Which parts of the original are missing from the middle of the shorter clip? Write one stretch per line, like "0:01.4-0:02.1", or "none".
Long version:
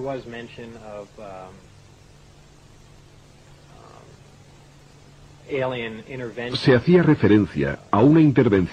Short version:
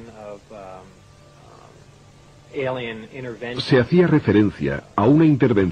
0:01.9-0:03.5
0:04.7-0:05.3